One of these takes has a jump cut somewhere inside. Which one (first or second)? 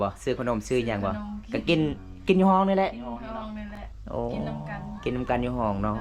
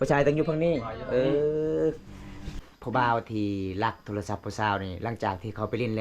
second